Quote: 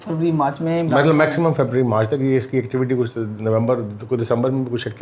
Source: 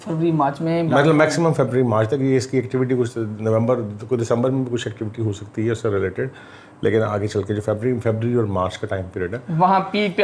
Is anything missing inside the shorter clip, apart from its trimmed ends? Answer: no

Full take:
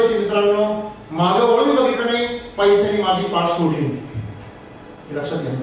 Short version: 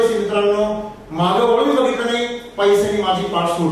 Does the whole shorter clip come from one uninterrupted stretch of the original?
yes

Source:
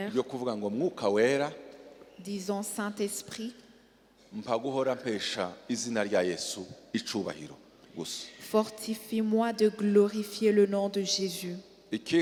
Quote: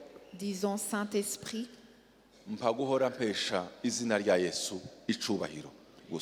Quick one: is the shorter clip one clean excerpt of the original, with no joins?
yes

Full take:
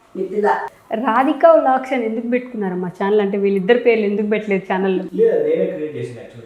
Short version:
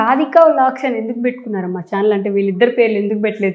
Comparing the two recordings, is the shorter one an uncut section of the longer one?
yes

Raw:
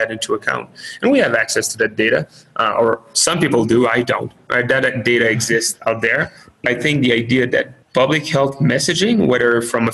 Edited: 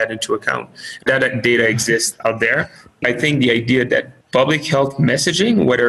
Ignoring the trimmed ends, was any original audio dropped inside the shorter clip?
yes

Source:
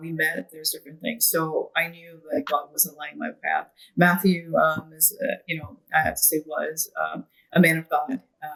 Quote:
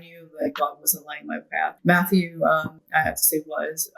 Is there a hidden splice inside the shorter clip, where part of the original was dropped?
yes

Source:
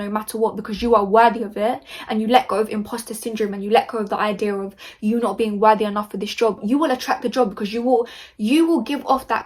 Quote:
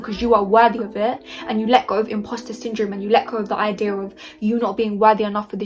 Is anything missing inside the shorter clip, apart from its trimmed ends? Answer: no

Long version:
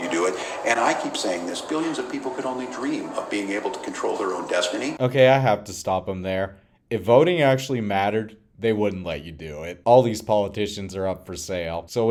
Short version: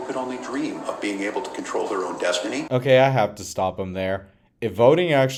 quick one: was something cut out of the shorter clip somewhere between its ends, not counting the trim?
no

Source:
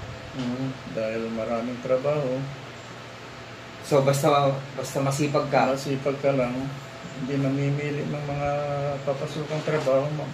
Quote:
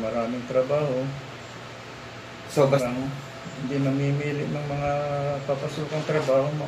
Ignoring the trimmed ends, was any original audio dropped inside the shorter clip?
yes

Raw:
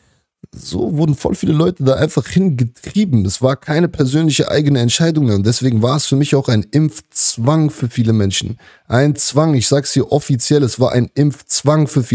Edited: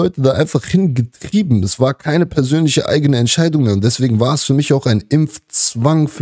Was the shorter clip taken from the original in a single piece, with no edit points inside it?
yes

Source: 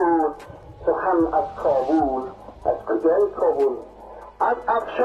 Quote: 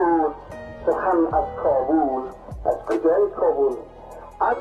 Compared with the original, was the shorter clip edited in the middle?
no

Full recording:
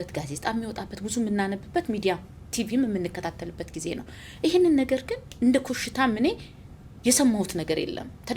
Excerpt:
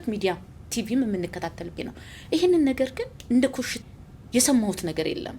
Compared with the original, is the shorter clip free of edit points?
no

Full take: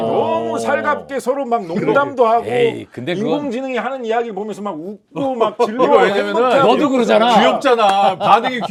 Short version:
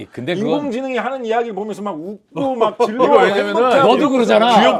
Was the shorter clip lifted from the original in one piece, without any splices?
yes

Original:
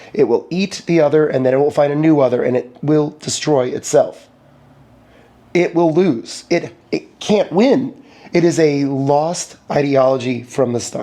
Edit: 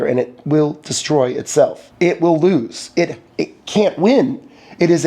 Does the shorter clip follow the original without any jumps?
no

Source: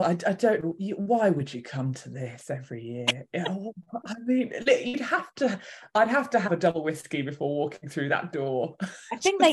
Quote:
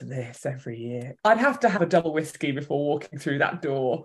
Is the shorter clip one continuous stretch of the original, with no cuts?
no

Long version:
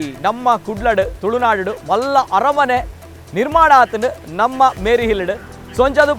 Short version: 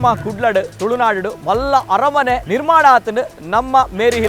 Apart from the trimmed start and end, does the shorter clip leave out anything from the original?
yes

